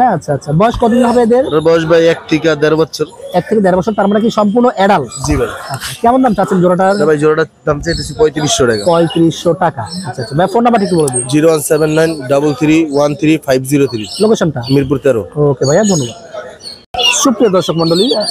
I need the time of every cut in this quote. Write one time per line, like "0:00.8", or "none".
none